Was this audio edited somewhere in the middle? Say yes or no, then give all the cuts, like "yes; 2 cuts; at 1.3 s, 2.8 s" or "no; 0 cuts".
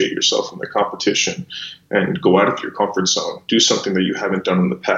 no; 0 cuts